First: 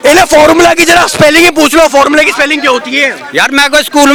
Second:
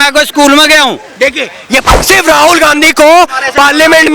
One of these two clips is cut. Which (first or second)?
second